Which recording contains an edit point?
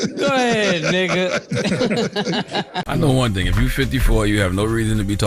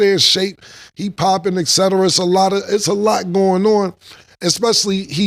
first; 1 cut; at 2.7 s

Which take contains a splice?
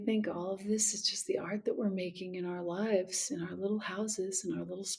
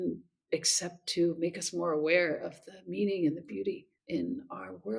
second; 1 cut; at 3.9 s

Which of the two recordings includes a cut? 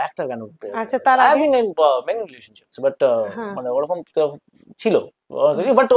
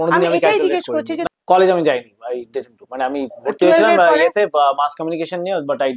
second; 1 cut; at 1.2 s

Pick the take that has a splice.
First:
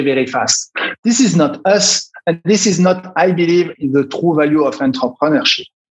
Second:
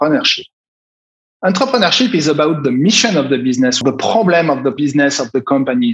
second; 2 cuts; at 3.8 s, 4.8 s

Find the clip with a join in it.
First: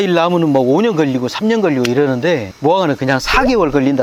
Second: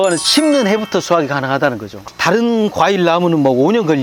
second; 1 cut; at 1.9 s

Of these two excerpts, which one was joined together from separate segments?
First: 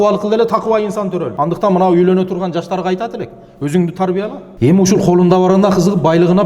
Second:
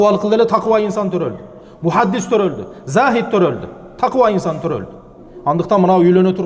first; 2 cuts; at 1.3 s, 4.4 s

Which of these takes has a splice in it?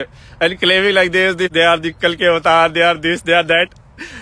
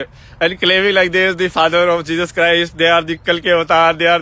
first; 1 cut; at 1.5 s

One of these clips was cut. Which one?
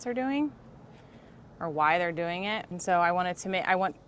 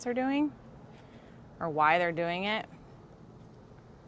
first; 1 cut; at 2.7 s

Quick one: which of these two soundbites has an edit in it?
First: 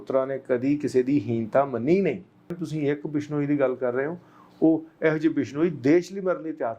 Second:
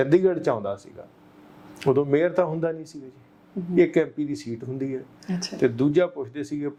first; 1 cut; at 2.6 s

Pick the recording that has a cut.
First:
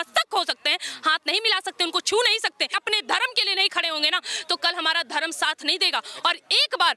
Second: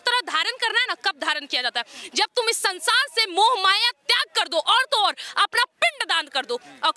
first; 1 cut; at 2.8 s

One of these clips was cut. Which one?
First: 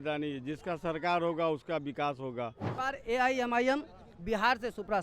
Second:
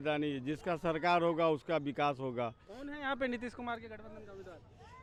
first; 1 cut; at 2.7 s

